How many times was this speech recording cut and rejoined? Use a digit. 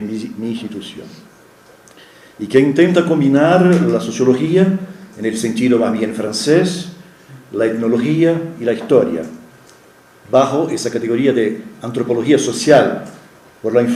0